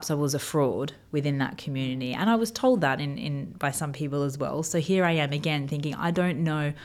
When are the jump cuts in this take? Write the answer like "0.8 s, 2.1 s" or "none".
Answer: none

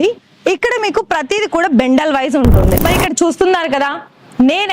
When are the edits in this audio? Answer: 2.8 s

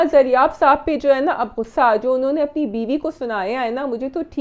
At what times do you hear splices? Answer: none

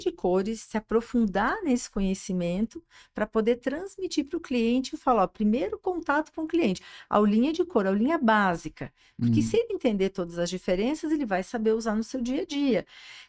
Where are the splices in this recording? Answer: none

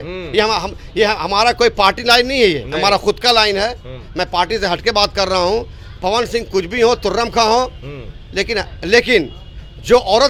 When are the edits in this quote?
none

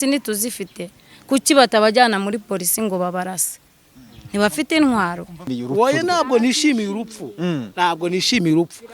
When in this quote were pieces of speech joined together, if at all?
5.5 s

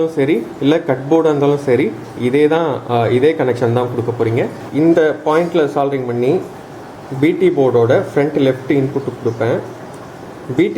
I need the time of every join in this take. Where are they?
4.6 s

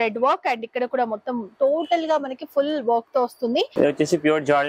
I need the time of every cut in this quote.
3.7 s

